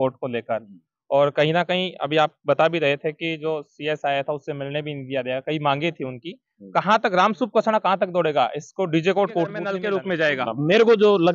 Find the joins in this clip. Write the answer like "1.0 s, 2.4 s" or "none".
9.8 s

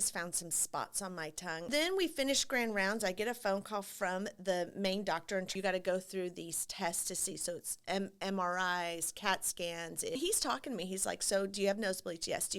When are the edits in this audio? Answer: 1.7 s, 5.5 s, 10.2 s

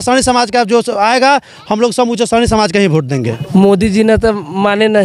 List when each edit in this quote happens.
3.4 s

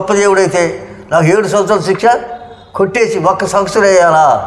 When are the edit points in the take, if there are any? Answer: none

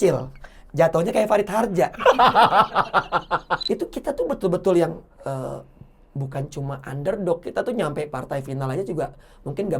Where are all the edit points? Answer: 3.5 s

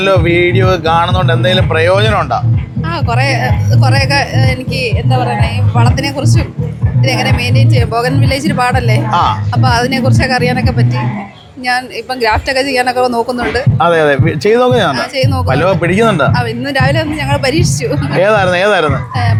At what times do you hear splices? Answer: none

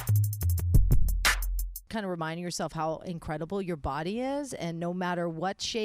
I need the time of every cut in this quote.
1.8 s

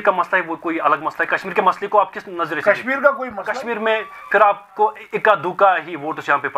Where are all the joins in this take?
3.4 s

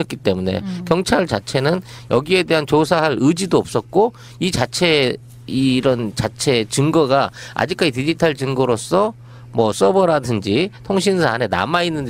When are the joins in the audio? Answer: 6.1 s

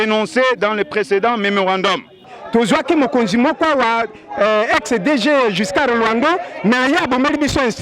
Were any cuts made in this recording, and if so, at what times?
2.4 s

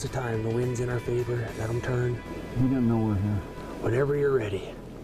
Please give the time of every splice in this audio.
2.3 s, 3.6 s

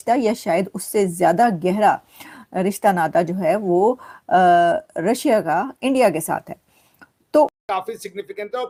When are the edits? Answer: none

